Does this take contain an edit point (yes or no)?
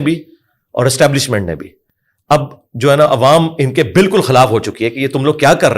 yes